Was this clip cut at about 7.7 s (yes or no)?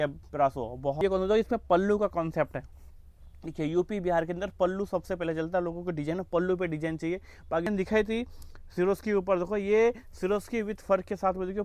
yes